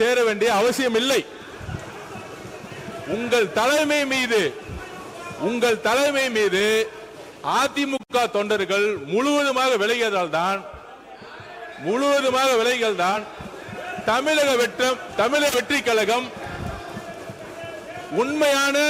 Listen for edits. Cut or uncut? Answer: uncut